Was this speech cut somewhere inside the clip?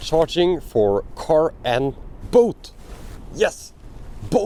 no; 0 cuts

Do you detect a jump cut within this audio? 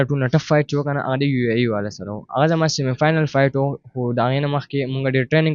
no; 0 cuts

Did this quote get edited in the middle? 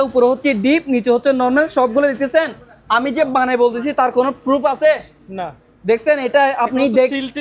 no; 0 cuts

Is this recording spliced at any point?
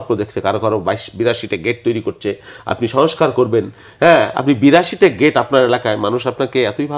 no; 0 cuts

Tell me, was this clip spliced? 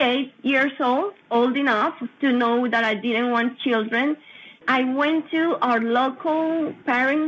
yes; 2 cuts; at 1.2 s, 4.6 s

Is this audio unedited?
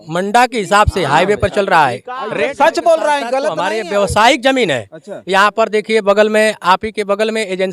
no; 1 cut; at 3.5 s

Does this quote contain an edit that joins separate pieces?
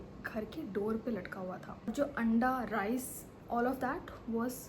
yes; 1 cut; at 1.9 s

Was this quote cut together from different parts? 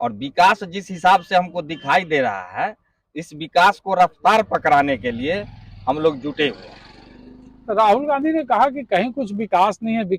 no; 0 cuts

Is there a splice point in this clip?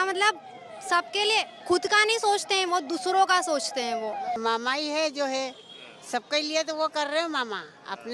yes; 1 cut; at 4.4 s

